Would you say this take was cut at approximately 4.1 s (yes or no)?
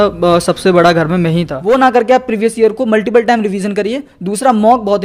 no